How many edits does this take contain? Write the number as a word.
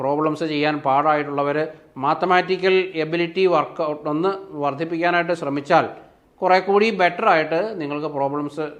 zero